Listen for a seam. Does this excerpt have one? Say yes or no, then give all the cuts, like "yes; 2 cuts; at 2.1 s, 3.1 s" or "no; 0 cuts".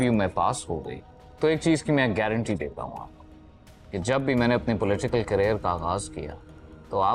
no; 0 cuts